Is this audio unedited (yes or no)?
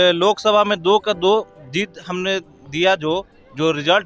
yes